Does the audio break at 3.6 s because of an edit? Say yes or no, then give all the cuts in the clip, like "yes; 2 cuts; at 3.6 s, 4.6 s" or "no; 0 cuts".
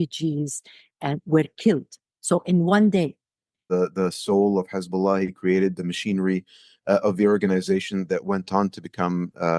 yes; 1 cut; at 3.6 s